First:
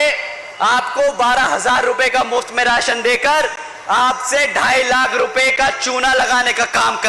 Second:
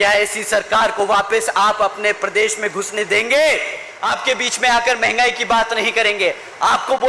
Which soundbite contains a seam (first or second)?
second